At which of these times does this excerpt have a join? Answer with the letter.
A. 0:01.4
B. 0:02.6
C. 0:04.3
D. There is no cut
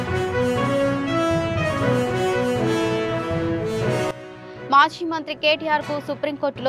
C